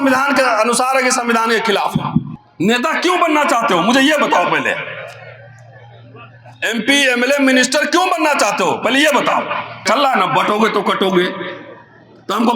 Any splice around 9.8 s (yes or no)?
yes